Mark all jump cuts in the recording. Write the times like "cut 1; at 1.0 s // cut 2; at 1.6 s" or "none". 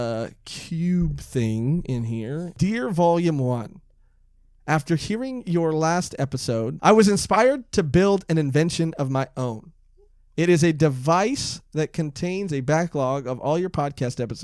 cut 1; at 2.5 s // cut 2; at 6.7 s